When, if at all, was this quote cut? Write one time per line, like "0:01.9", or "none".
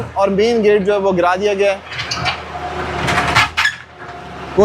none